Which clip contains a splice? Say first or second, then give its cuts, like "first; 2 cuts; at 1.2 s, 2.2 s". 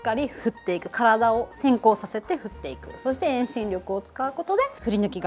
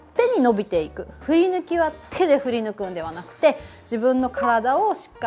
second; 1 cut; at 1.2 s